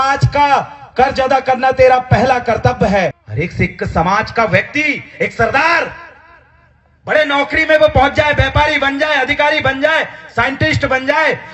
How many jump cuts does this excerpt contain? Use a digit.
1